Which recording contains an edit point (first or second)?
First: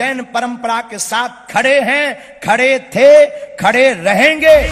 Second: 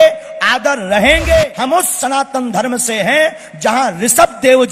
second